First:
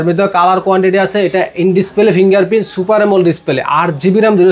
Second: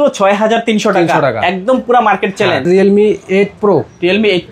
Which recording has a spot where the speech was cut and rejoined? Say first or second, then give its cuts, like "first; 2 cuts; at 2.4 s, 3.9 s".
second; 1 cut; at 2.6 s